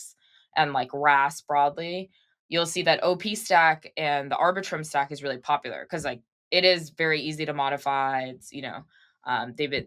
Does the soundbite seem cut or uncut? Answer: uncut